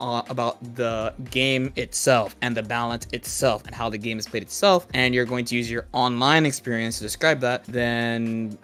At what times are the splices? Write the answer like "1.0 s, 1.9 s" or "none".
none